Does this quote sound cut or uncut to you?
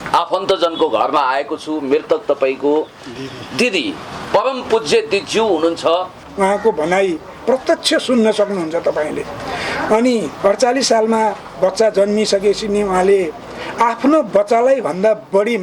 cut